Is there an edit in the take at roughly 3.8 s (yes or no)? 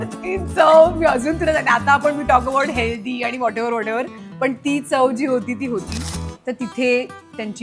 no